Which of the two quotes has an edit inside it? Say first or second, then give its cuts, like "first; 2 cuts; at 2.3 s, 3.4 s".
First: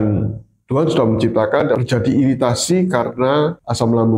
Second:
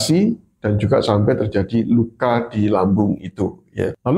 first; 1 cut; at 1.8 s